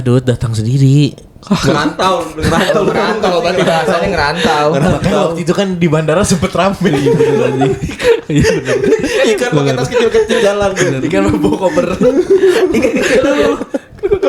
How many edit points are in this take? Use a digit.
0